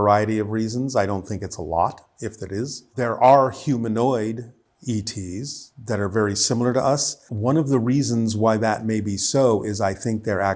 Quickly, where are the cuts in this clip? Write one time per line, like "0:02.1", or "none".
0:02.9
0:07.2